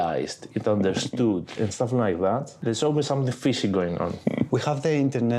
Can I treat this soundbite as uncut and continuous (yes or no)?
no